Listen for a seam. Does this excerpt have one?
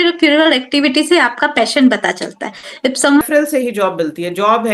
yes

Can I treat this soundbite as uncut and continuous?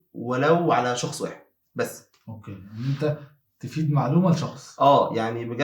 yes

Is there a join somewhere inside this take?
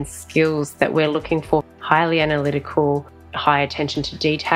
yes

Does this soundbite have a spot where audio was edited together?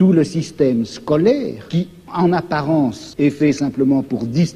yes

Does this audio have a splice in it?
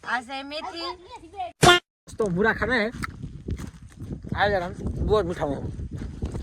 yes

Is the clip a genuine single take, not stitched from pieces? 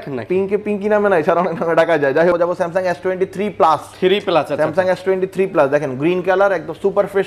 no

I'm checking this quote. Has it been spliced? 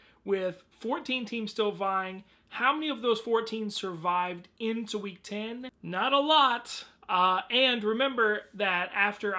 no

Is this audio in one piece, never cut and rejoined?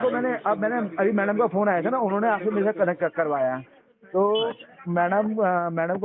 yes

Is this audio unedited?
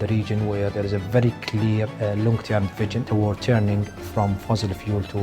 no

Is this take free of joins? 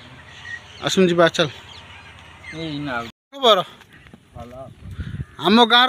yes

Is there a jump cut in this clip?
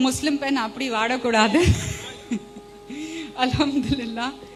no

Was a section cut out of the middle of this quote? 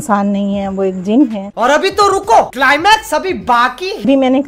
yes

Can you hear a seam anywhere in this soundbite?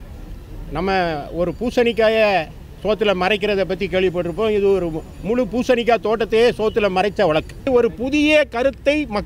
yes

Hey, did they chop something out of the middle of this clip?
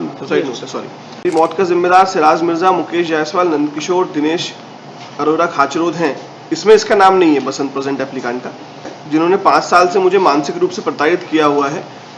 yes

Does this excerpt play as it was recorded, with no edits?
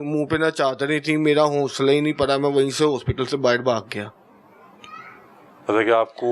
yes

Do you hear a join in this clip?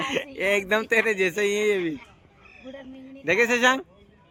no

